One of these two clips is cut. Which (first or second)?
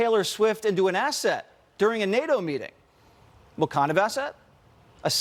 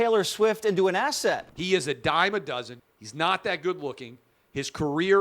second